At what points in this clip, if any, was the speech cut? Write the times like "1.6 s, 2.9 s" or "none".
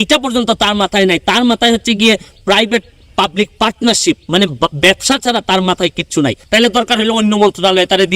6.4 s